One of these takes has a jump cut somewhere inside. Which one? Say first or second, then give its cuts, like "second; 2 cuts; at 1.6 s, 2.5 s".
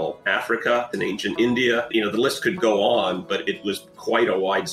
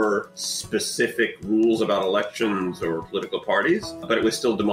first; 1 cut; at 0.9 s